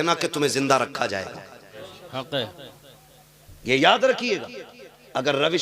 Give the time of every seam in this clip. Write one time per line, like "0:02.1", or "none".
0:01.8